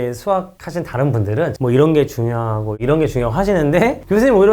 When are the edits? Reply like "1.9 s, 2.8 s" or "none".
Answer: 1.5 s